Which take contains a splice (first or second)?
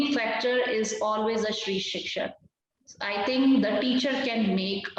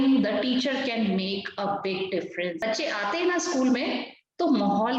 second